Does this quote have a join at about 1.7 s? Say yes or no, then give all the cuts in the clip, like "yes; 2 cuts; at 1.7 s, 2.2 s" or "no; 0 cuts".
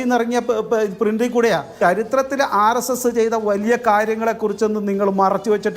yes; 1 cut; at 1.7 s